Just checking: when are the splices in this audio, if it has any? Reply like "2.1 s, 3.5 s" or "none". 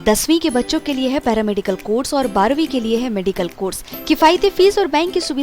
none